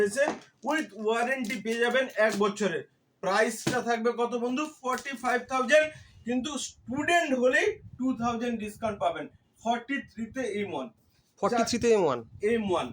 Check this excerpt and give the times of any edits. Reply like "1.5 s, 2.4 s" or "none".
none